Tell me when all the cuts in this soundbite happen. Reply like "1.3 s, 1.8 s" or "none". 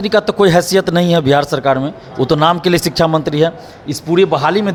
none